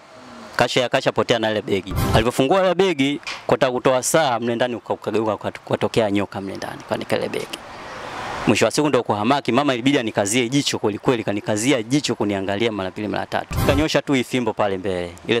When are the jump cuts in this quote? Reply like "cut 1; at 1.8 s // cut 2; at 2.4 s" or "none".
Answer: cut 1; at 2.0 s // cut 2; at 13.6 s

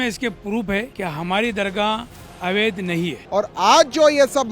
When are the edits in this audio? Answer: cut 1; at 0.9 s // cut 2; at 3.2 s

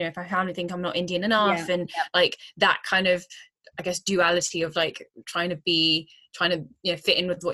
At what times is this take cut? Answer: none

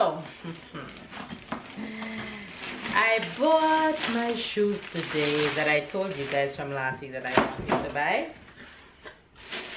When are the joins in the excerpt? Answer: none

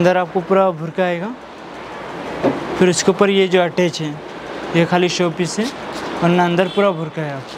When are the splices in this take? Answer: none

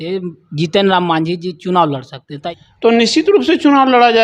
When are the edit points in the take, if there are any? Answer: cut 1; at 2.4 s

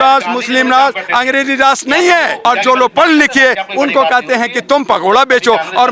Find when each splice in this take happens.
cut 1; at 2.4 s

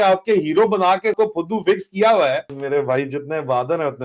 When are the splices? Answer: cut 1; at 1.1 s // cut 2; at 2.5 s

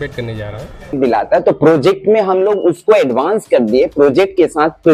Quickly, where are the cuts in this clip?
cut 1; at 0.9 s

